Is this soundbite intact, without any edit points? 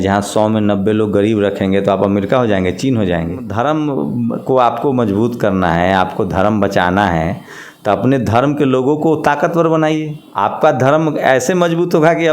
no; 2 cuts; at 3.5 s, 10.2 s

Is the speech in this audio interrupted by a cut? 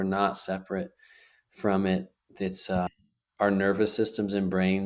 yes; 1 cut; at 2.9 s

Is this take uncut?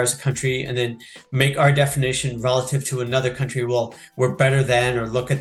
yes; 0 cuts

